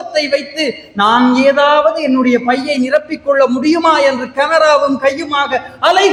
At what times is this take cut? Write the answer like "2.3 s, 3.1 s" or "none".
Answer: none

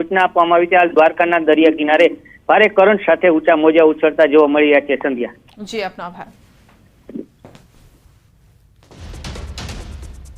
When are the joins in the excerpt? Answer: 5.9 s

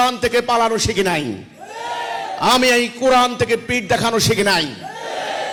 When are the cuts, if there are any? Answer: none

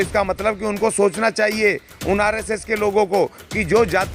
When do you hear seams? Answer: none

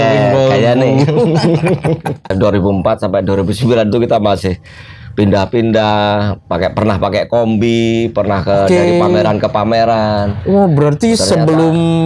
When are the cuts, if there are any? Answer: 2.2 s

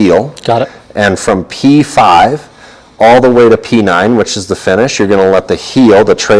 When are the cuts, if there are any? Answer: none

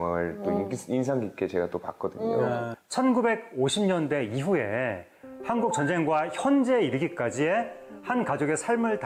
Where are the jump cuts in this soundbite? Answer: none

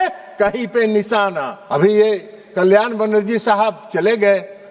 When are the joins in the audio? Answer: 1.6 s

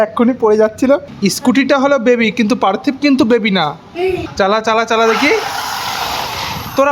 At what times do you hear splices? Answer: 1.1 s, 4.3 s

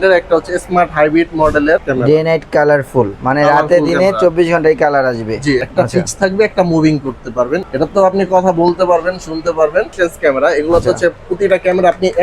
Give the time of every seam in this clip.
1.9 s, 5.6 s, 7.7 s, 9.9 s

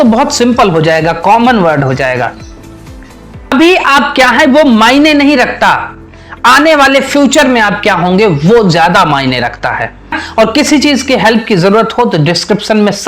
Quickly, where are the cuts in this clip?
3.5 s, 10.2 s

